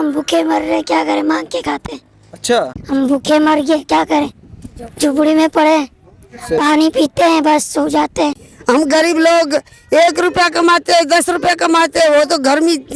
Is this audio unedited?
no; 2 cuts; at 2.8 s, 8.5 s

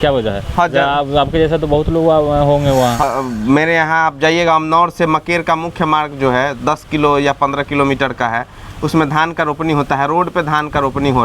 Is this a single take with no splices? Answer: no; 1 cut; at 3.0 s

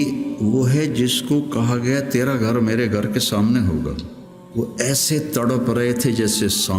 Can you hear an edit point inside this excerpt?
yes; 1 cut; at 4.4 s

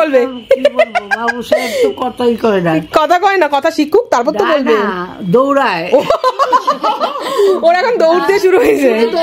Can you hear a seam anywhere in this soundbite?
no; 0 cuts

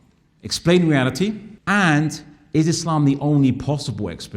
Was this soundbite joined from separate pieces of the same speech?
yes; 1 cut; at 1.5 s

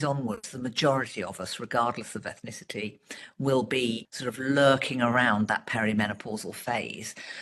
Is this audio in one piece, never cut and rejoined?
no; 1 cut; at 4.1 s

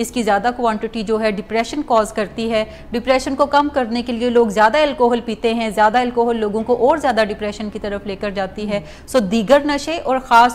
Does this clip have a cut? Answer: no; 0 cuts

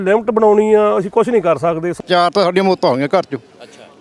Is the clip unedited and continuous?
no; 1 cut; at 1.9 s

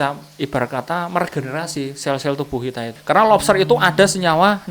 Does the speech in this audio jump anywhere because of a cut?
yes; 1 cut; at 2.9 s

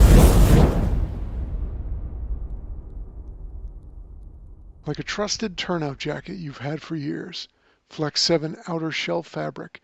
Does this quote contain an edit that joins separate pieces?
yes; 1 cut; at 4.8 s

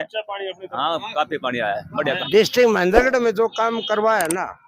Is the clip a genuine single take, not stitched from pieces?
no; 1 cut; at 2.2 s

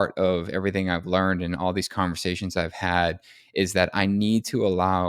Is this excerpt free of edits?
yes; 0 cuts

